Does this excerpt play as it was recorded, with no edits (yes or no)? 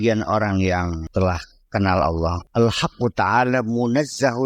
no